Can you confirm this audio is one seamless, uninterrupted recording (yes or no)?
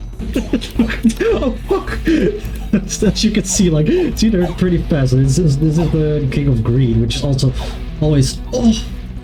yes